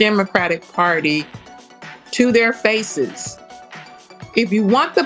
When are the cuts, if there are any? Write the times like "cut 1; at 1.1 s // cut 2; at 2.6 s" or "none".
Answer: none

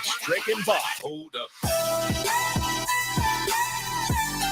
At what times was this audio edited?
cut 1; at 1.0 s

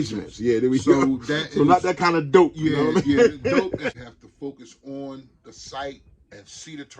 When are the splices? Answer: cut 1; at 3.8 s

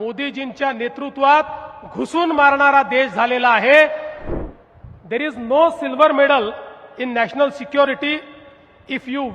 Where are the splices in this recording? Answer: cut 1; at 4.2 s

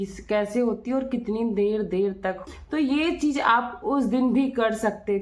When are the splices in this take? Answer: cut 1; at 2.5 s

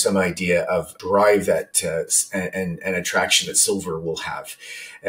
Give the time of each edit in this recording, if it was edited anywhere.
cut 1; at 1.0 s

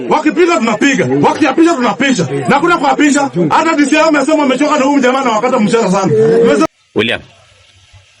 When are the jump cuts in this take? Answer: cut 1; at 6.7 s

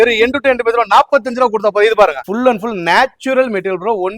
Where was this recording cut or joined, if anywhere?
cut 1; at 2.2 s

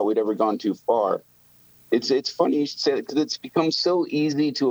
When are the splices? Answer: none

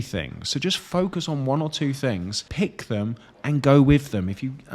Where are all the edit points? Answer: cut 1; at 2.4 s

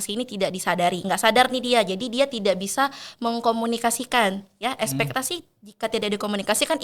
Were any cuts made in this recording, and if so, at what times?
none

